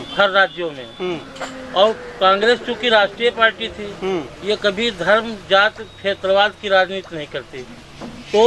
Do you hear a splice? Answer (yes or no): no